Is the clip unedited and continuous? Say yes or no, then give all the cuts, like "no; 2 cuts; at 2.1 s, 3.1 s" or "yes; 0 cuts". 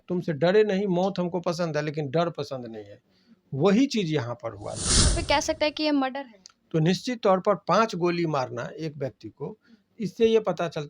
no; 1 cut; at 5.2 s